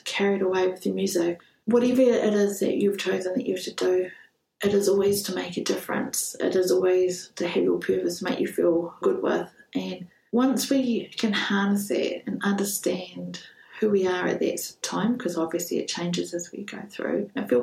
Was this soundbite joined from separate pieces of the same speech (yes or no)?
yes